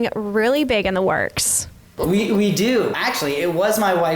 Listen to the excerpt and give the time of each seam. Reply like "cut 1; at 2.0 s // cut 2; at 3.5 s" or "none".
cut 1; at 1.9 s // cut 2; at 3.0 s